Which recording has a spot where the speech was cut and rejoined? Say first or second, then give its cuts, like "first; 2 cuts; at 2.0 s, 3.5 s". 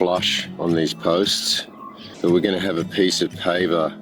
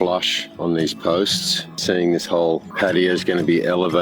second; 1 cut; at 1.8 s